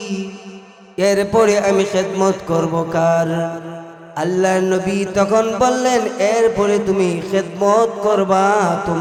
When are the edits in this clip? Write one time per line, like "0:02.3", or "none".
none